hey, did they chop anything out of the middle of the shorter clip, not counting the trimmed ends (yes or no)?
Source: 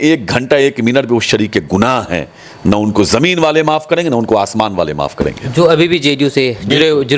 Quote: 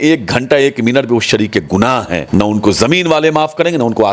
yes